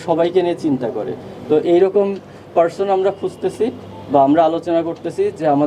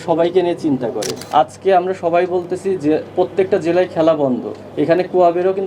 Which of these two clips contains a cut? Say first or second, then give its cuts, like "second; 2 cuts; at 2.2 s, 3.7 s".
second; 1 cut; at 1.2 s